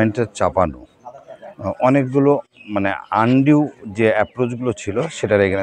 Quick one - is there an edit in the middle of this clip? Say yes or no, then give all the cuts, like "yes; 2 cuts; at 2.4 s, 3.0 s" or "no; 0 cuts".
no; 0 cuts